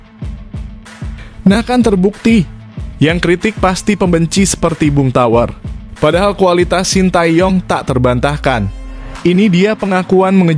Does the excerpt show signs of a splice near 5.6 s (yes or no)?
no